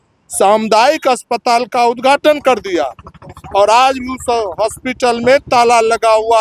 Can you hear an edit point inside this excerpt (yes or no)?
no